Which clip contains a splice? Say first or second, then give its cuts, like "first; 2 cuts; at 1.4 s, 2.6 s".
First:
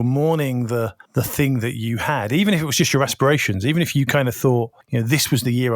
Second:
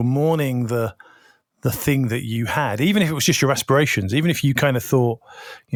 first; 2 cuts; at 1.0 s, 4.8 s